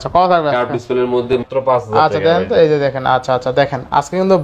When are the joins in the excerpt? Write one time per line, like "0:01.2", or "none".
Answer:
0:01.4